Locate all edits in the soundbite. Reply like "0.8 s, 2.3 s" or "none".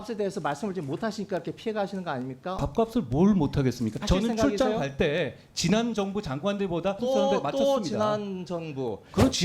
2.6 s, 4.0 s, 7.0 s